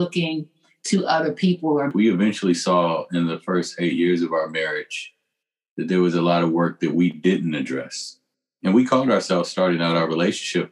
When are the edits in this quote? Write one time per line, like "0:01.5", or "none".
none